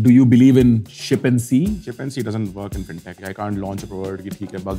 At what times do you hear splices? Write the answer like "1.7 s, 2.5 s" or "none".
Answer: 0.9 s, 1.9 s, 3.2 s